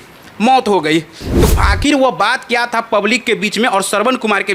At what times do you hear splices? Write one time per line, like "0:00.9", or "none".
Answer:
0:01.2